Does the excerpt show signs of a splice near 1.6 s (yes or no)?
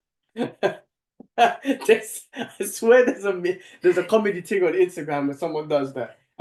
no